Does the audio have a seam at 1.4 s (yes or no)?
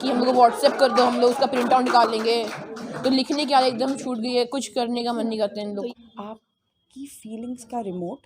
no